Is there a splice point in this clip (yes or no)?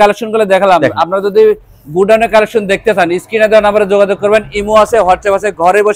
no